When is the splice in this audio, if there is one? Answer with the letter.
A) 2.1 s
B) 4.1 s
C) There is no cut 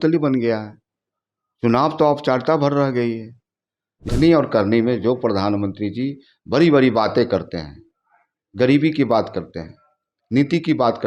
B